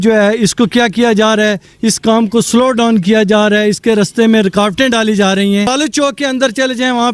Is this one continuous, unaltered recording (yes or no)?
no